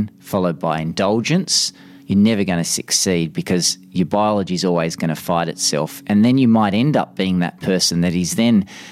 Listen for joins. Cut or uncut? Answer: uncut